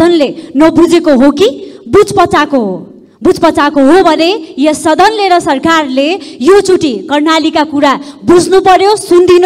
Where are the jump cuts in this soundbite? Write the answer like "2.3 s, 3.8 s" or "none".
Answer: none